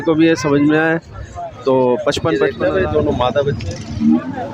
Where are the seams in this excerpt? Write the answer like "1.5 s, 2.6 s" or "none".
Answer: 2.5 s